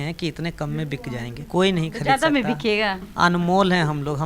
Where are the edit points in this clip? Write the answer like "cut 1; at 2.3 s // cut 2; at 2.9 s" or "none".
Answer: cut 1; at 1.4 s